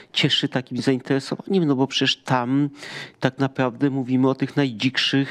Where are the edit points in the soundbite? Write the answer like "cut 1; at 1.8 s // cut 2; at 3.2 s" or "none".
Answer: none